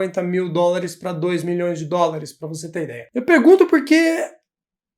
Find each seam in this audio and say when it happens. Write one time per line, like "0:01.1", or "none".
0:03.0